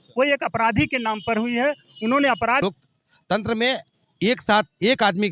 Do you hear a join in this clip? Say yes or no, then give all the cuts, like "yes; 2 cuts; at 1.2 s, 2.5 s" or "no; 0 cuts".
yes; 1 cut; at 2.6 s